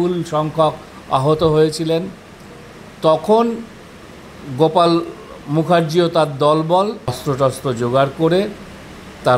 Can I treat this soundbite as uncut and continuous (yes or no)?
no